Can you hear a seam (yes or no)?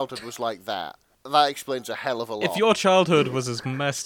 no